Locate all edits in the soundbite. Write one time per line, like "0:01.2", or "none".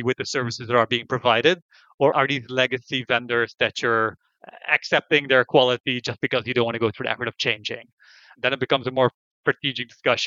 0:02.1
0:08.3